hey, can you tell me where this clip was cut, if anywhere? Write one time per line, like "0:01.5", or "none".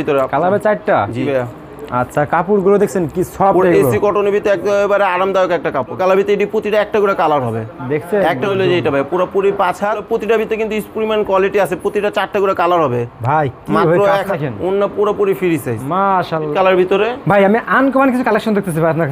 0:01.3
0:06.0
0:08.5
0:10.0
0:14.3
0:16.5